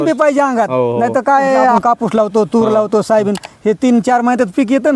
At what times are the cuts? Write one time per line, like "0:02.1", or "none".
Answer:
0:01.8